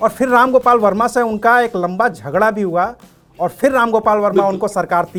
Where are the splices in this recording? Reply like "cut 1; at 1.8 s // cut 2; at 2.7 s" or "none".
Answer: none